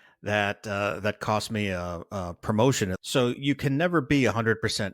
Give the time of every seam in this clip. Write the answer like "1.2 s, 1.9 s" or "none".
3.0 s